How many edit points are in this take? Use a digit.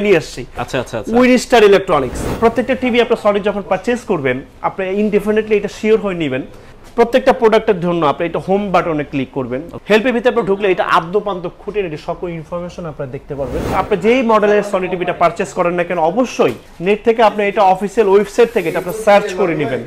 4